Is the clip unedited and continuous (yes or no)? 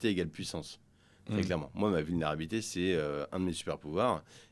yes